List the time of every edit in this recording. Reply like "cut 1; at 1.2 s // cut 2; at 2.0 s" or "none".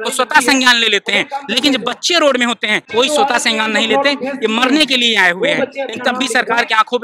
cut 1; at 2.9 s